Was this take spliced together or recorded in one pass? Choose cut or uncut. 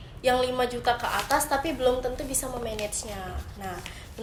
uncut